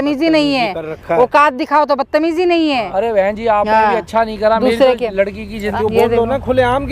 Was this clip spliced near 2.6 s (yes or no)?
no